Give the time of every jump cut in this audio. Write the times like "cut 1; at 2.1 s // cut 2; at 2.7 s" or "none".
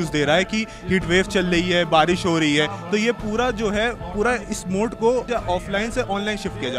cut 1; at 5.3 s